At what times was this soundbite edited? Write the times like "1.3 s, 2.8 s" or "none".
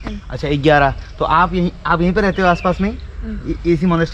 none